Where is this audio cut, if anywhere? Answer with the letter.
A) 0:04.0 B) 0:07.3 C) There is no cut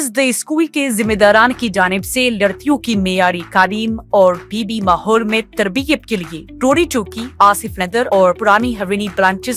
C